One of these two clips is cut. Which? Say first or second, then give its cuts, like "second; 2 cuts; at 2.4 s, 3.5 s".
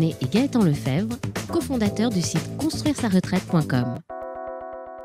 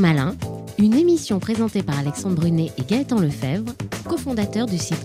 first; 1 cut; at 4.1 s